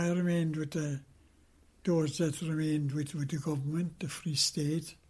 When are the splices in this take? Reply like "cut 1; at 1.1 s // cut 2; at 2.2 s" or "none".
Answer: none